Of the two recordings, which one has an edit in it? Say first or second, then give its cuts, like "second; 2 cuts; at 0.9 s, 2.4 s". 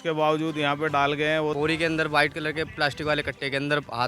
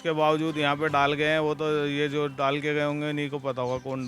first; 1 cut; at 1.5 s